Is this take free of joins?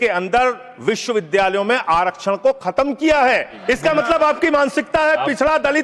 no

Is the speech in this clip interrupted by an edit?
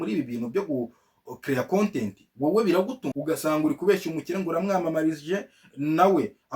yes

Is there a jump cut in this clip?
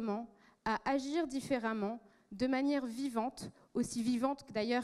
no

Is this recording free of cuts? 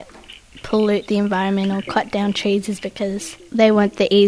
no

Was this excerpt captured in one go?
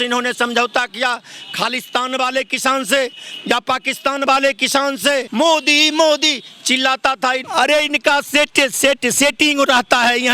no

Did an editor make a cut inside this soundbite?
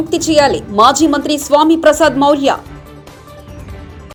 no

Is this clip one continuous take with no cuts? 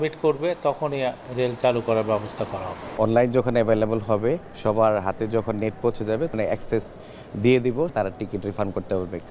no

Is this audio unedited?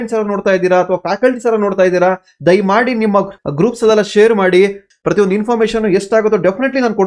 no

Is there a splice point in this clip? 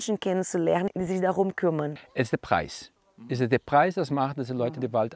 yes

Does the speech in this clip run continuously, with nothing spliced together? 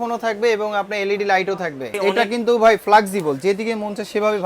no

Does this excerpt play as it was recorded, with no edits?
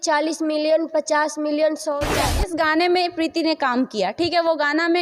no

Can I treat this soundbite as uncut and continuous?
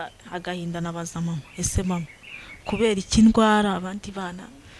yes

